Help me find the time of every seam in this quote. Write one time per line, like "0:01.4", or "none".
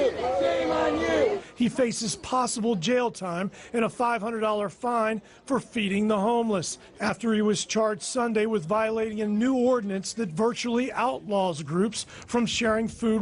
0:04.8